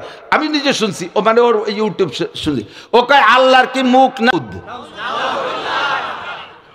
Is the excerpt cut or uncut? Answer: cut